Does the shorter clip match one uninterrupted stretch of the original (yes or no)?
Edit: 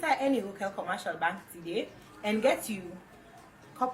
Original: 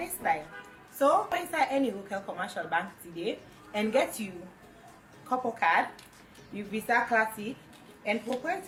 yes